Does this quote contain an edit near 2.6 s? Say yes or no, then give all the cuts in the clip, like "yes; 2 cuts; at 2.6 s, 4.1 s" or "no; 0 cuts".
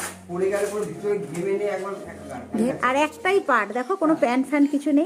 yes; 1 cut; at 2.6 s